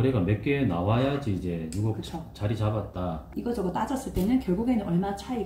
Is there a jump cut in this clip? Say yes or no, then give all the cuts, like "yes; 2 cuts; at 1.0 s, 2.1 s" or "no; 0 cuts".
yes; 1 cut; at 3.3 s